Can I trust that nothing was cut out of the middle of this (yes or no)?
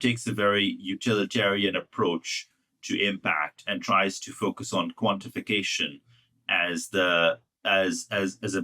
yes